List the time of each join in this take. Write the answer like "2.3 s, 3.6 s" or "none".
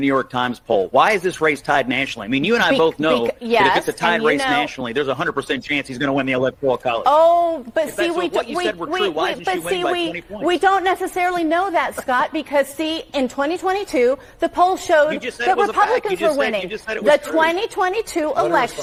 none